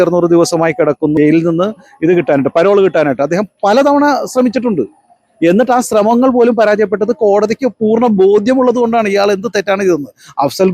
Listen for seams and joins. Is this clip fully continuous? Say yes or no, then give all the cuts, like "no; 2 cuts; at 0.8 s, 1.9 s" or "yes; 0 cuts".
no; 1 cut; at 1.1 s